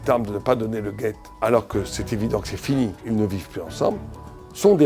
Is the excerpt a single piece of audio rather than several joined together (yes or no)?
no